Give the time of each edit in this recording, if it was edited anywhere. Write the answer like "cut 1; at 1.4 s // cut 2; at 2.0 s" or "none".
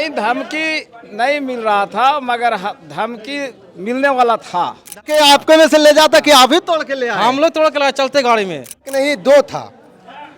cut 1; at 5.1 s // cut 2; at 8.9 s